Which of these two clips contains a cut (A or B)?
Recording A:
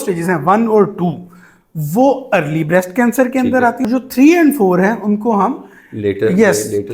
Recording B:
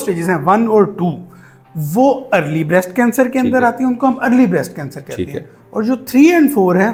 A